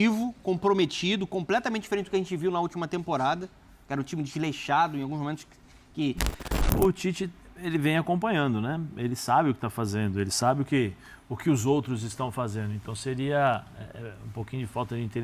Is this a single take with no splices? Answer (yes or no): no